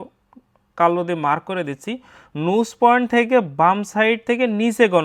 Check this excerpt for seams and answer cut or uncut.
uncut